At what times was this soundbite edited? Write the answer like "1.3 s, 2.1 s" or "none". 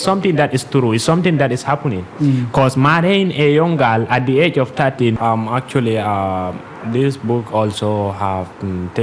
5.2 s